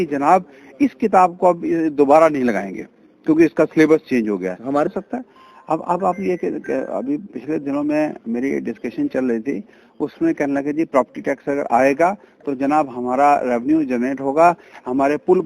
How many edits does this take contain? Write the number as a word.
one